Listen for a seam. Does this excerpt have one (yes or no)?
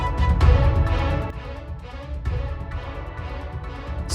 yes